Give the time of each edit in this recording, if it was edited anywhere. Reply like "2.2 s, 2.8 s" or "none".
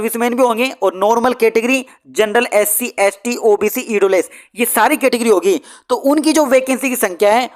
none